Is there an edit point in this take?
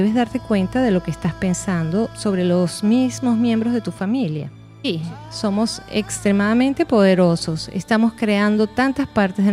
yes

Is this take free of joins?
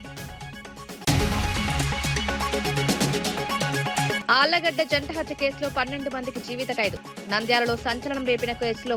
no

